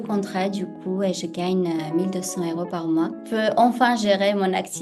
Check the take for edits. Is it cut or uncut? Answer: cut